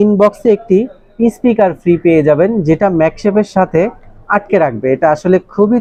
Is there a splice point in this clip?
no; 0 cuts

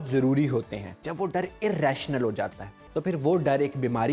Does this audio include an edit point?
yes; 2 cuts; at 1.0 s, 2.8 s

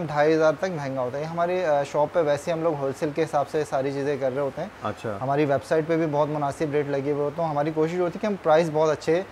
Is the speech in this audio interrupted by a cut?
no; 0 cuts

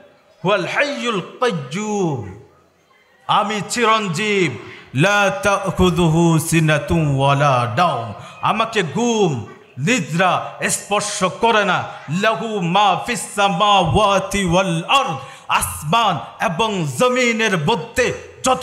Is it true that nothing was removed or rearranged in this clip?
yes; 0 cuts

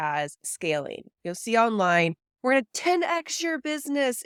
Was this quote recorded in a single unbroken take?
yes; 0 cuts

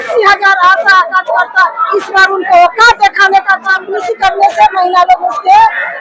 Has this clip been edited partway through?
yes; 1 cut; at 3.9 s

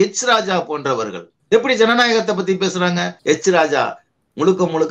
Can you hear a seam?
yes; 2 cuts; at 1.3 s, 3.1 s

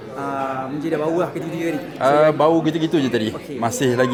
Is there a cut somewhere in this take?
no; 0 cuts

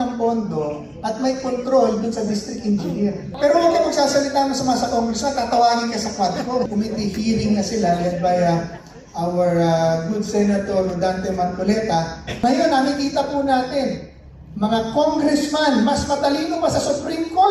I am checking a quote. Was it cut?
yes; 3 cuts; at 3.3 s, 6.7 s, 12.3 s

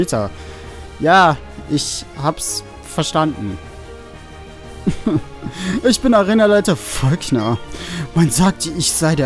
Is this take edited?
no; 0 cuts

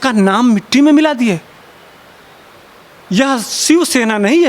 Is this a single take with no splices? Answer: yes; 0 cuts

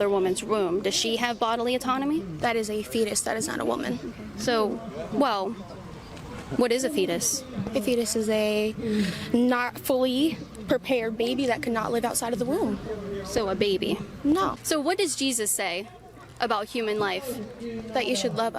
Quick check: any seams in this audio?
yes; 1 cut; at 14.6 s

